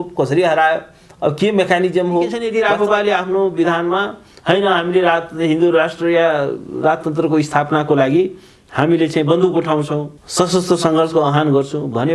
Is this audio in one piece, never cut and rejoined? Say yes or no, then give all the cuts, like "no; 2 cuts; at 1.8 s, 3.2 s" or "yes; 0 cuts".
no; 2 cuts; at 2.4 s, 10.2 s